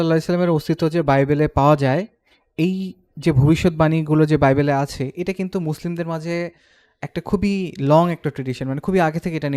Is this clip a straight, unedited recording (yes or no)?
yes